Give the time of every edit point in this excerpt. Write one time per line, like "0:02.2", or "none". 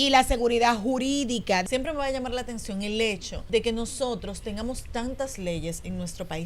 0:01.6
0:03.3